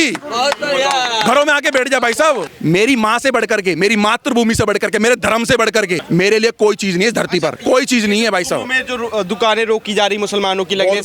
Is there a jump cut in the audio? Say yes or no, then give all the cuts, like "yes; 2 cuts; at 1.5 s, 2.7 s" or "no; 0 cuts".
yes; 2 cuts; at 2.4 s, 6.0 s